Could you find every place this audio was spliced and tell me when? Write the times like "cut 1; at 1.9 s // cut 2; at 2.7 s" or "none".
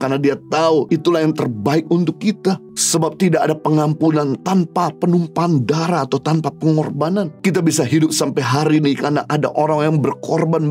cut 1; at 0.9 s // cut 2; at 2.7 s // cut 3; at 7.3 s